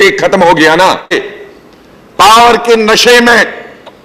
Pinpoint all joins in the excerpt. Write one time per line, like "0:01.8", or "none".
0:01.3